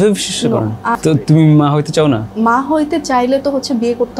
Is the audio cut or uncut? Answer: cut